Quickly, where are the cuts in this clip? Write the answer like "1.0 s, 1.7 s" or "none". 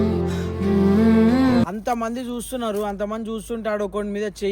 1.6 s